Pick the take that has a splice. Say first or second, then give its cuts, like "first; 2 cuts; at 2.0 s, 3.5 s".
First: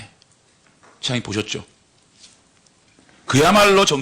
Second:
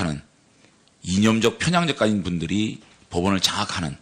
first; 1 cut; at 2.8 s